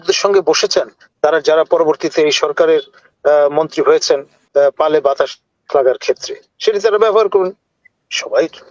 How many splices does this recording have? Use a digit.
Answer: 1